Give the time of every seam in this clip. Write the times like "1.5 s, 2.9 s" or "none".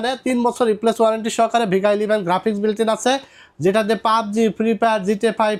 none